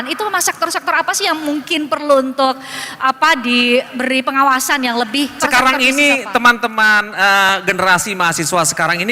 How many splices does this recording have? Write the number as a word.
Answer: one